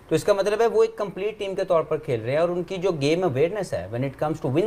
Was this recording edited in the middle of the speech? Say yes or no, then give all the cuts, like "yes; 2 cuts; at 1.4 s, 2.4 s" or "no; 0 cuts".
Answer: no; 0 cuts